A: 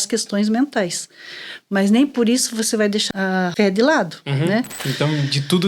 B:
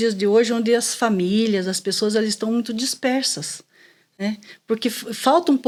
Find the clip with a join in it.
A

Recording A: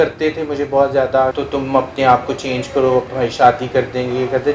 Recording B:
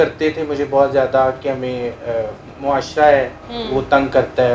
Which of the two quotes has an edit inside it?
A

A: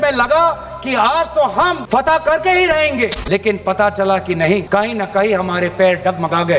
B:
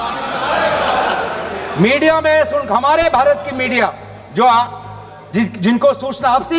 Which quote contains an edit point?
A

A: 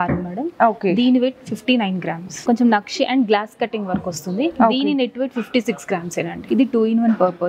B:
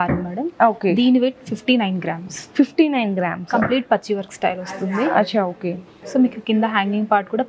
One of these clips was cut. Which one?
A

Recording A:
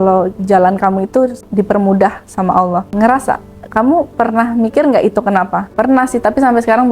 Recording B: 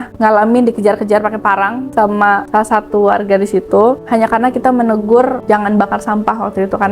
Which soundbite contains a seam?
A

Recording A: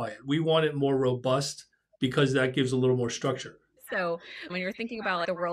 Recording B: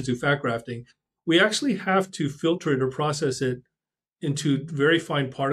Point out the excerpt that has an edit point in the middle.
A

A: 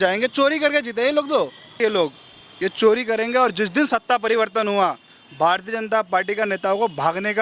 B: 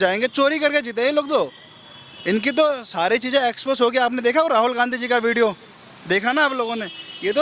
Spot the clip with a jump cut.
A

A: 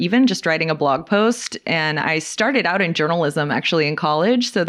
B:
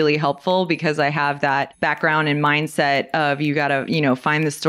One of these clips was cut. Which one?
B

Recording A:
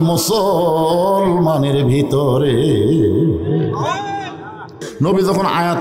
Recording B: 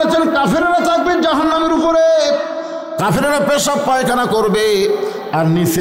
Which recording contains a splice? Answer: A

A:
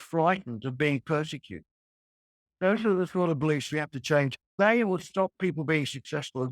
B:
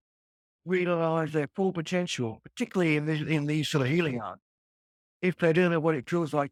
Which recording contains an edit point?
A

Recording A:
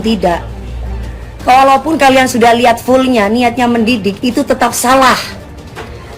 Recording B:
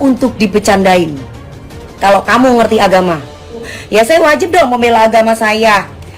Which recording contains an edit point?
B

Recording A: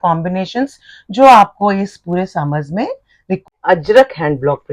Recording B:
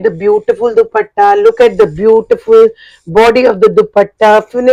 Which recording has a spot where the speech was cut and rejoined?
A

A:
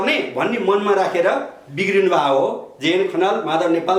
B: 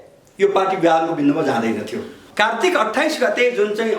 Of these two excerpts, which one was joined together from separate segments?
B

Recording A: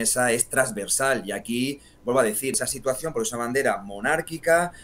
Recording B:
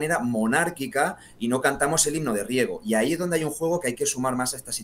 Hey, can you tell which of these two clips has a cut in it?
A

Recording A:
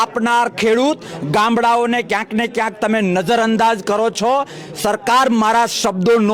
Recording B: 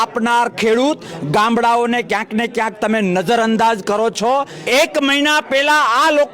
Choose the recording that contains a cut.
B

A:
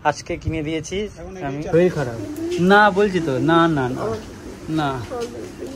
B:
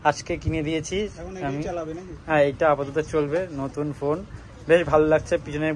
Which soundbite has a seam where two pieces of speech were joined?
A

